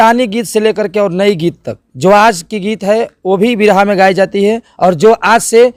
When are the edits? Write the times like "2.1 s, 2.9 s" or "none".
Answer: none